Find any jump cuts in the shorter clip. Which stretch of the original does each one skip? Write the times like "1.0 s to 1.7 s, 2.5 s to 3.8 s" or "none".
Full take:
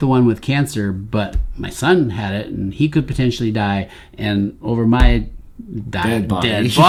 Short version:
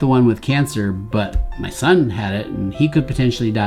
none